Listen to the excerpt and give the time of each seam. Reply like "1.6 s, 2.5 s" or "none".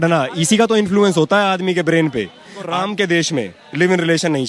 2.7 s